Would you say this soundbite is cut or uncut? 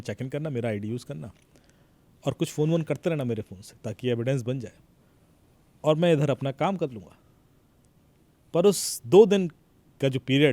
uncut